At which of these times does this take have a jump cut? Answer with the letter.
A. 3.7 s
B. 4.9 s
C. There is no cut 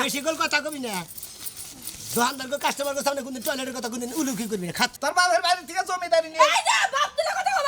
B